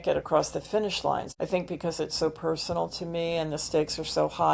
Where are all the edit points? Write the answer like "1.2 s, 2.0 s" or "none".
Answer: 1.3 s